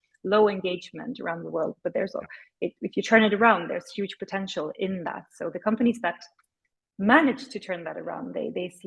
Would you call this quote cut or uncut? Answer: uncut